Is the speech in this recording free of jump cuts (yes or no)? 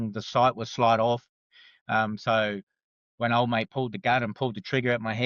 yes